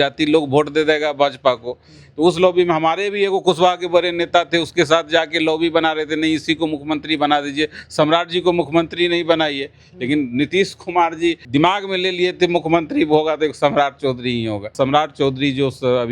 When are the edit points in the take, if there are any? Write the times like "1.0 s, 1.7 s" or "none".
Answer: 11.4 s, 14.7 s